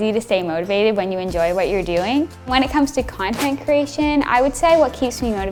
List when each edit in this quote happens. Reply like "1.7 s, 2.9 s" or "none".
none